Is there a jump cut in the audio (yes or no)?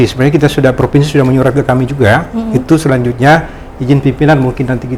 no